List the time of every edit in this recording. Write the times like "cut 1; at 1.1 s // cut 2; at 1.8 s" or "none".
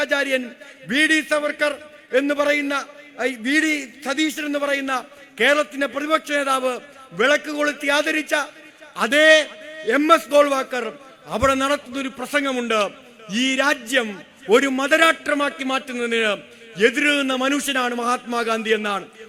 none